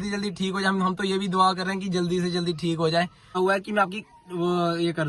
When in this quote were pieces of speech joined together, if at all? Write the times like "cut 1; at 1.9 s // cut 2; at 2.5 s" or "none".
cut 1; at 3.4 s